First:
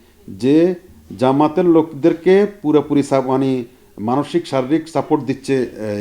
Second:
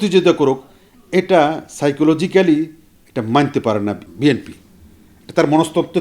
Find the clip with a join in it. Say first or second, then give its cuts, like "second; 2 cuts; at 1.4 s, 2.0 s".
second; 1 cut; at 4.1 s